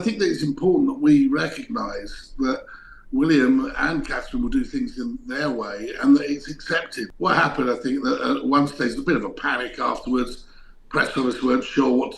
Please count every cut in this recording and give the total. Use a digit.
1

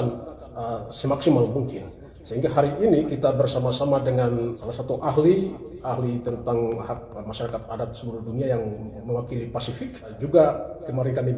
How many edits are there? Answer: 2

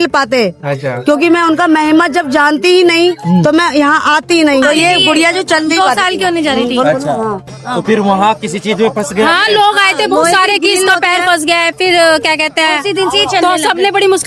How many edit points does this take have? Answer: 1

